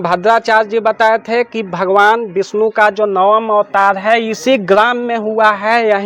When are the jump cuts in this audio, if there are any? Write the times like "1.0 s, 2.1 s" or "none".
none